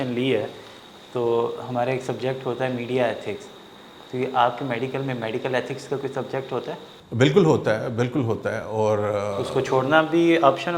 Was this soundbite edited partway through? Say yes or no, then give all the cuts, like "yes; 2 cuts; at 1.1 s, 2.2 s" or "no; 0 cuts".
no; 0 cuts